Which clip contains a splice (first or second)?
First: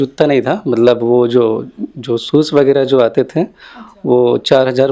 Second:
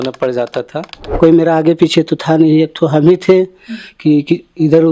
second